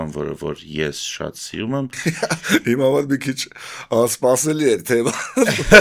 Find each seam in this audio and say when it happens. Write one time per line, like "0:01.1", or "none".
0:02.0